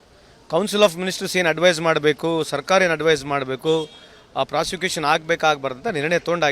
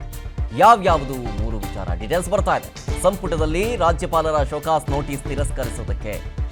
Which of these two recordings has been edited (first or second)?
first